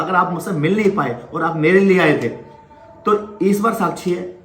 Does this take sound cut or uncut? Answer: uncut